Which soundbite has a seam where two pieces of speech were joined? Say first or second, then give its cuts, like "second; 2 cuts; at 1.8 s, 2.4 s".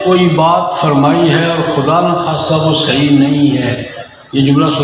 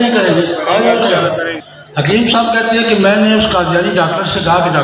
second; 1 cut; at 1.6 s